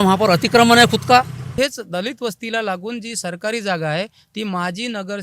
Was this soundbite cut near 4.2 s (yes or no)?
no